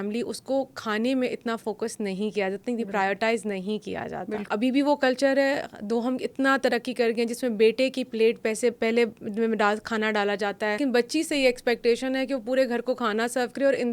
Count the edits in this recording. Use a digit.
2